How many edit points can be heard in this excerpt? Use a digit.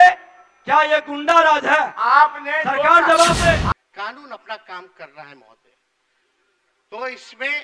1